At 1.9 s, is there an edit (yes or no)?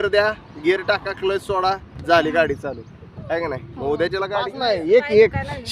no